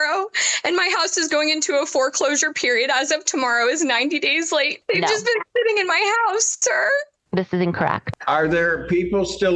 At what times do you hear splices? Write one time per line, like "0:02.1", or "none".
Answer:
0:04.8
0:08.0